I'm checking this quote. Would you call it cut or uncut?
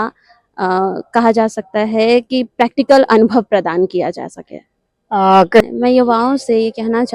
cut